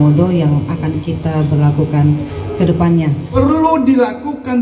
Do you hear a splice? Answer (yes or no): yes